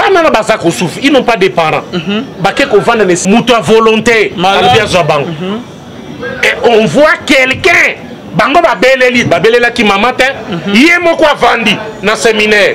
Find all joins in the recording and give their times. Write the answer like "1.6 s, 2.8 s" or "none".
3.2 s